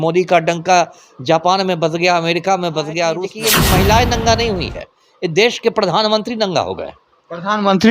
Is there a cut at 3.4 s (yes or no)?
yes